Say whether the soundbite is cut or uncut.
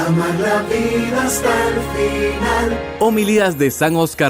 cut